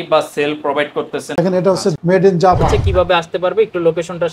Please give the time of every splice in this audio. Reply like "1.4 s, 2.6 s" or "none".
1.6 s, 2.7 s

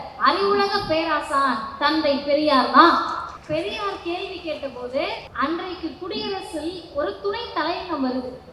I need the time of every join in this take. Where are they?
3.3 s, 5.2 s

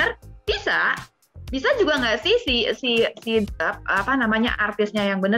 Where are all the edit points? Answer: none

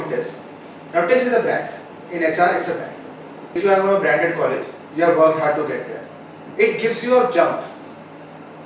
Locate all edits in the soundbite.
3.5 s

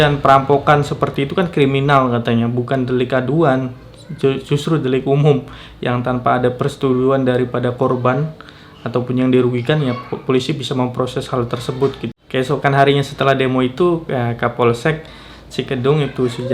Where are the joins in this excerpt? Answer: 12.1 s

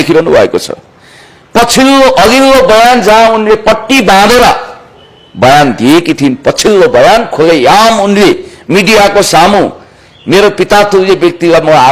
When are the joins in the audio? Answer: none

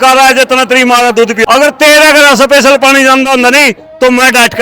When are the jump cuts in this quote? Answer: 1.4 s

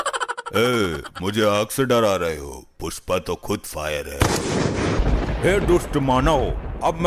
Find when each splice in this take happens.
5.0 s

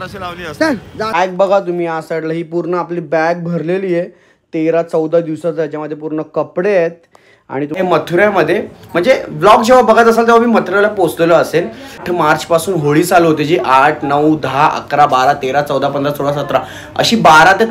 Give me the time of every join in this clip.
1.1 s, 7.8 s, 12.1 s

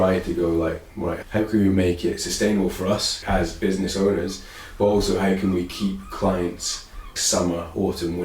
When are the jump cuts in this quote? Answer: 7.1 s

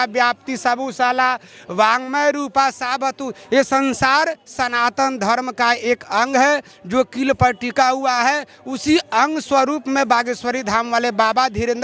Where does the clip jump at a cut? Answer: none

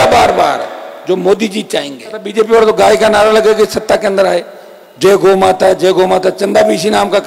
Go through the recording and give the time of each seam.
2.2 s

